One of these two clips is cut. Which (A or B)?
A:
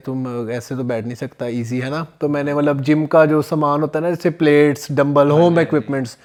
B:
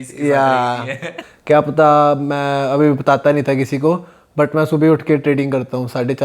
B